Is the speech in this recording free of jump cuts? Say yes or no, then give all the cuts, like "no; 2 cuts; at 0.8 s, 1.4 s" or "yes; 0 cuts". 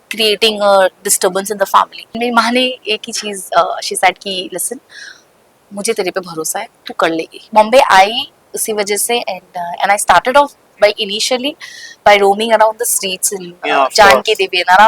no; 2 cuts; at 2.0 s, 7.4 s